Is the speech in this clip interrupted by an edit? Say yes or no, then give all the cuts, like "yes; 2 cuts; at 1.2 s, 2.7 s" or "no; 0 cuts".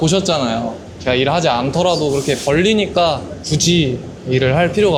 no; 0 cuts